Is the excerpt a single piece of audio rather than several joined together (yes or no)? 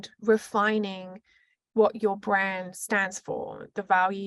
yes